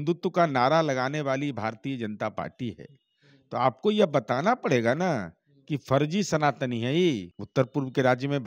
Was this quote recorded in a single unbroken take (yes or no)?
no